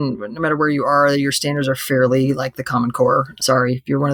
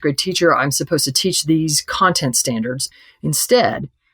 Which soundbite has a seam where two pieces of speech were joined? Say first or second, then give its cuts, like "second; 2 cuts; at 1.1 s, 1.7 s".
second; 1 cut; at 2.9 s